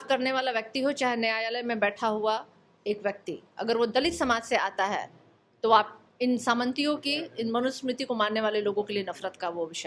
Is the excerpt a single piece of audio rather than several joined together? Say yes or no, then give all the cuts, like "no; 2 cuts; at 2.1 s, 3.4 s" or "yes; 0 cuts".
yes; 0 cuts